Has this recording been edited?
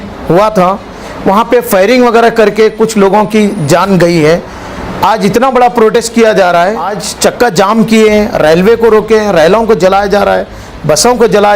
yes; 1 cut; at 7.0 s

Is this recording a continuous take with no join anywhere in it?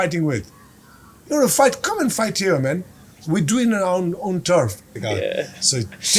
no; 1 cut; at 4.9 s

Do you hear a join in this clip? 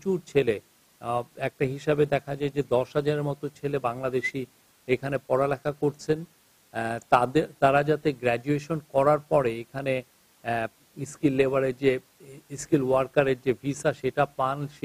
no; 0 cuts

